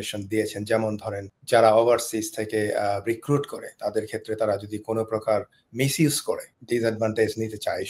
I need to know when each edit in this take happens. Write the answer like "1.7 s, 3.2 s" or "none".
1.3 s, 6.5 s